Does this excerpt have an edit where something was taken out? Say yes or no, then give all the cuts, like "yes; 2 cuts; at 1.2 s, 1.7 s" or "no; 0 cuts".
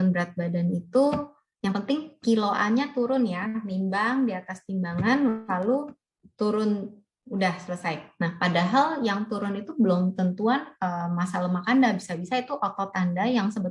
no; 0 cuts